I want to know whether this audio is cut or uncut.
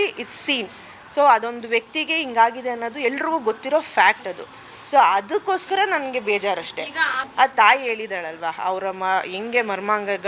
cut